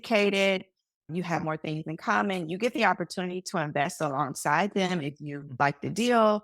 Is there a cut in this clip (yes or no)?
no